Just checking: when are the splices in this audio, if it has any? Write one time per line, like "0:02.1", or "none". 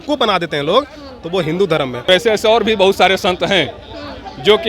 0:02.1